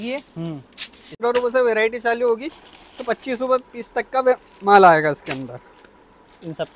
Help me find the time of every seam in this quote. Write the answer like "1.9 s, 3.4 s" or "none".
1.1 s